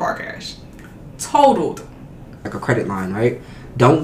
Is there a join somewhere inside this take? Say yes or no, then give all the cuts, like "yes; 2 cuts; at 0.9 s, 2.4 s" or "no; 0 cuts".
yes; 1 cut; at 2.5 s